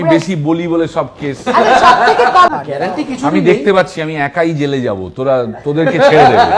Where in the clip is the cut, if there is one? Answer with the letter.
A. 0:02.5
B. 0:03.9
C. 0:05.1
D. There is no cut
A